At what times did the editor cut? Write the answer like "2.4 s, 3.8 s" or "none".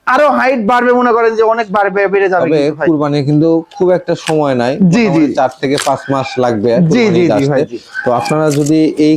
none

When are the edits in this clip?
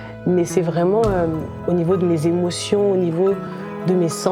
1.6 s

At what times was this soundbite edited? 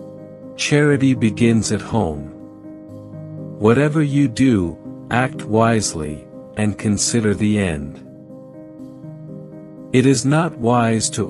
8.3 s, 9.8 s

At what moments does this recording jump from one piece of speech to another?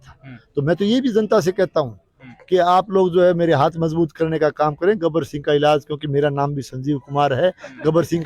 none

